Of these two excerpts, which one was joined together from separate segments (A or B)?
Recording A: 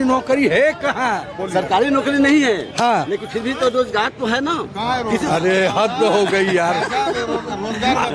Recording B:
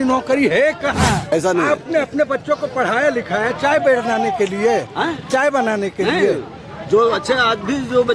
B